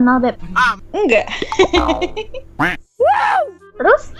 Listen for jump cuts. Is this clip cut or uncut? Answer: uncut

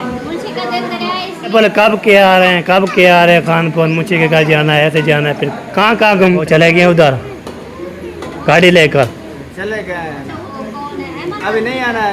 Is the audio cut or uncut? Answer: cut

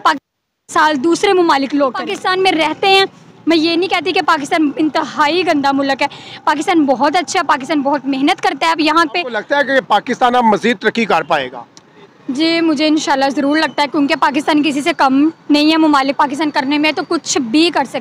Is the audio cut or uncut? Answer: cut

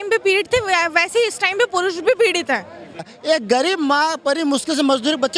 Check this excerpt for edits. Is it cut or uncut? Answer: uncut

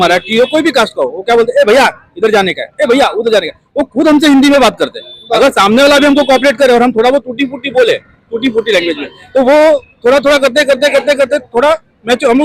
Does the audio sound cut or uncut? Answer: uncut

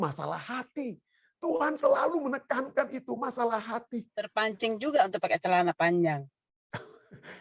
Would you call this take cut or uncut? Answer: cut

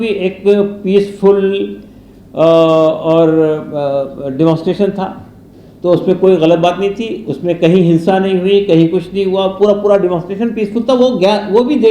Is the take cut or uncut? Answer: uncut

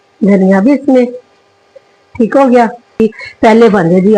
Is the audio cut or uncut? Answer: cut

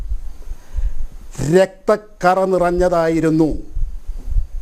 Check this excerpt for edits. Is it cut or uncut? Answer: uncut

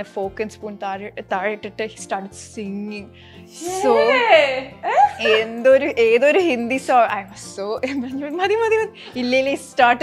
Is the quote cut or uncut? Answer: uncut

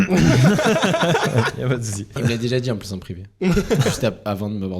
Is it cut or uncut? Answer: cut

